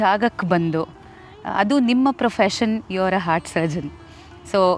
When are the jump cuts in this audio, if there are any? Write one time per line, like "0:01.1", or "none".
none